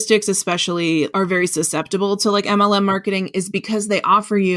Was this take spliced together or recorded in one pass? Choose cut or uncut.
cut